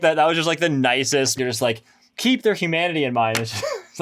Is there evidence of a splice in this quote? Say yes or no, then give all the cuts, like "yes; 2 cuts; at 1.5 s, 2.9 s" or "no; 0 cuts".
yes; 1 cut; at 1.3 s